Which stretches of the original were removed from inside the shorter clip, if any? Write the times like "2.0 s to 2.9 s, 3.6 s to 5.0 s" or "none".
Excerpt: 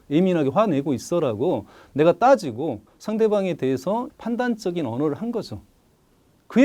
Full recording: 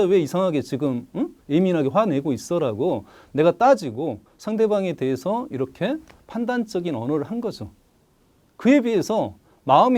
5.5 s to 6.2 s